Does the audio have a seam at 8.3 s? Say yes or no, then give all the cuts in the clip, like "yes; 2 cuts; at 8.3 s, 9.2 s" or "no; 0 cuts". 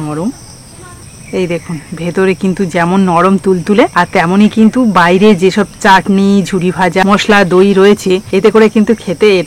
yes; 2 cuts; at 3.9 s, 8.3 s